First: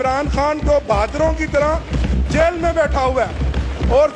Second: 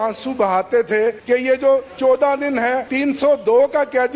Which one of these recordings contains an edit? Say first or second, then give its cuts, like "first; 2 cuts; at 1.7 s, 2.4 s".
second; 2 cuts; at 1.2 s, 2.9 s